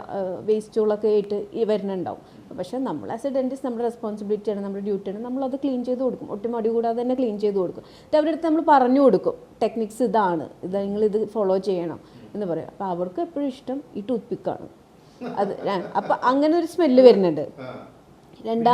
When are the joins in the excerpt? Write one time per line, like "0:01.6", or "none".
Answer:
none